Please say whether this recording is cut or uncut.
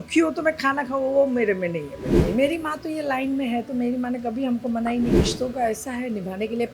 cut